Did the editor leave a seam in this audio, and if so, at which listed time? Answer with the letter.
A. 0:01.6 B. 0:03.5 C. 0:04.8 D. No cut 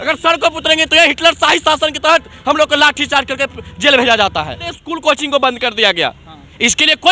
C